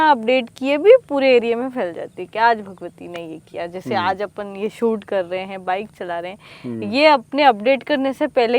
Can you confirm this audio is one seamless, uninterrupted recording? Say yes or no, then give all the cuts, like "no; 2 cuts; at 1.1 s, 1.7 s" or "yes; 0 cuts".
yes; 0 cuts